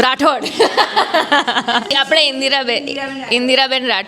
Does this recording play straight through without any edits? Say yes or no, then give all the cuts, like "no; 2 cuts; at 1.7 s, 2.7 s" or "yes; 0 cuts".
no; 1 cut; at 1.9 s